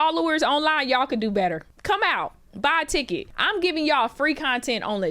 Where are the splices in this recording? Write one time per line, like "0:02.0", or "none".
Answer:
0:01.7
0:03.3